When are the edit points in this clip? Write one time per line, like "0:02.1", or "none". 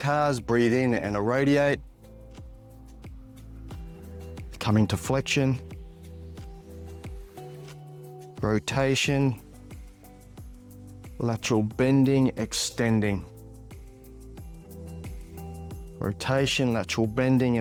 none